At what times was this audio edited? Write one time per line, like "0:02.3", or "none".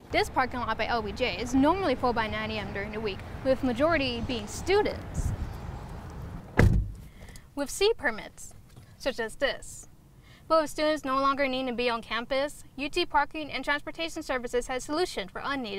none